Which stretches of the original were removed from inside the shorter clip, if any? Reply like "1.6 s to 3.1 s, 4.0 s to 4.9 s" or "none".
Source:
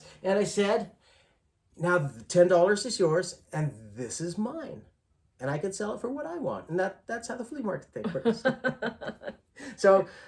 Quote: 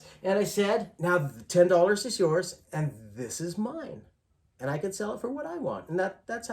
0.9 s to 1.7 s